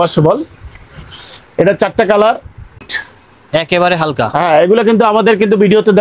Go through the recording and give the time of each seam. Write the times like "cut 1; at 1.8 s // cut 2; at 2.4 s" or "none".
cut 1; at 2.9 s